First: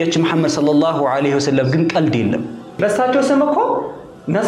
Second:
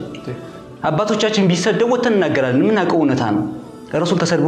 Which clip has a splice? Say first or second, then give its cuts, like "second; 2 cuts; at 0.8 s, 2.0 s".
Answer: first; 1 cut; at 2.8 s